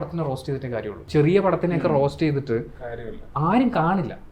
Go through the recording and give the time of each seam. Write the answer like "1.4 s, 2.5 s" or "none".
1.0 s